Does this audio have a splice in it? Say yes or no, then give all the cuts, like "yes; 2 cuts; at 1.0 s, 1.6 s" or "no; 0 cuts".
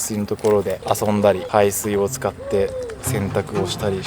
yes; 1 cut; at 1.4 s